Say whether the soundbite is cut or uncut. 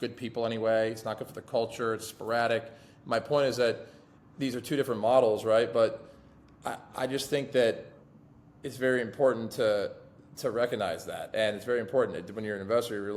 uncut